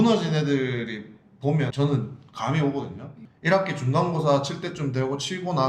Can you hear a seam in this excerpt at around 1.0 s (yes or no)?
no